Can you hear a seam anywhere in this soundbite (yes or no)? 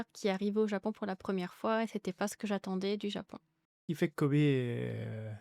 yes